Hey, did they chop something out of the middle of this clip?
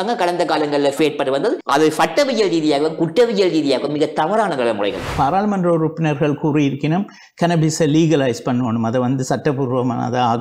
yes; 2 cuts; at 1.0 s, 5.1 s

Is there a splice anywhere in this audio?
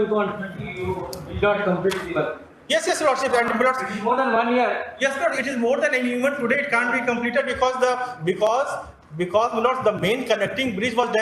no; 0 cuts

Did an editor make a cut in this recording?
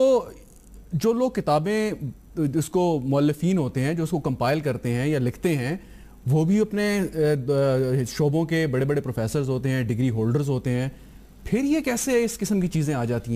yes; 1 cut; at 5.9 s

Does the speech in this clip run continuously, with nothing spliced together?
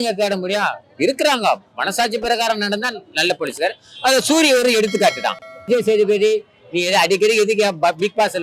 no; 1 cut; at 5.7 s

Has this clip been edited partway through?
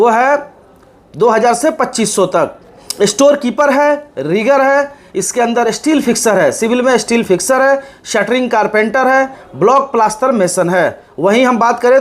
no; 0 cuts

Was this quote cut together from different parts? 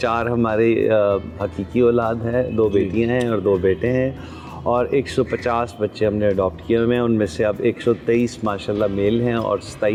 no; 0 cuts

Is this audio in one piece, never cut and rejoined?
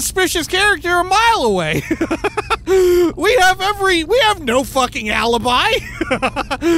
yes; 0 cuts

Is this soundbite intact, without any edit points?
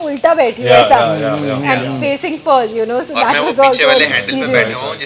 yes; 0 cuts

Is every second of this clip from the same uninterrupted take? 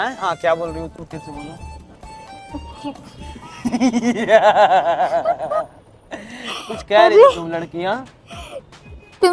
yes; 0 cuts

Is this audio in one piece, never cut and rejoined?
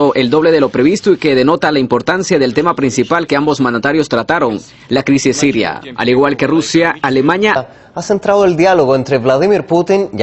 yes; 0 cuts

